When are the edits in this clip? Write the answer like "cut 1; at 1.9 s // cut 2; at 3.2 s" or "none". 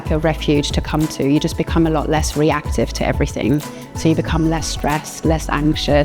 none